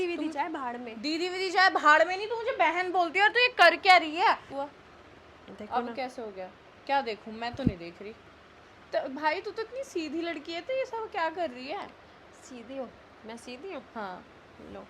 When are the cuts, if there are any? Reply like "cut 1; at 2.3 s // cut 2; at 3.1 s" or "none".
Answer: cut 1; at 4.5 s